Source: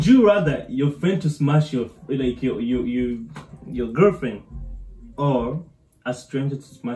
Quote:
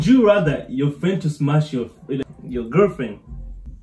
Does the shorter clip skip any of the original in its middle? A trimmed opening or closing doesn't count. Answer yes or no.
yes